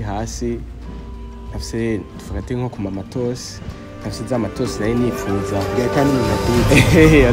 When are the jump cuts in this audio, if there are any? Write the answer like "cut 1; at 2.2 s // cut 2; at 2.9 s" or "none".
none